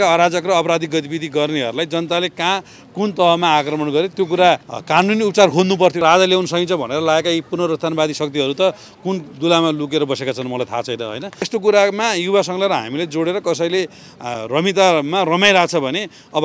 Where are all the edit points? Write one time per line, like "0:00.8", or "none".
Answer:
0:04.7
0:06.0
0:11.5